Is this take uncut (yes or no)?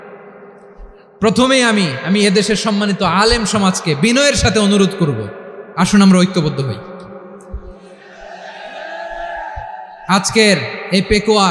yes